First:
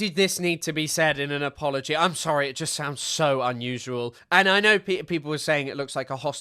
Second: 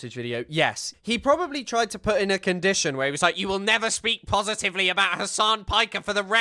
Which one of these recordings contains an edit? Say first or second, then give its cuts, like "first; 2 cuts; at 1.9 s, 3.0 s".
second; 1 cut; at 0.9 s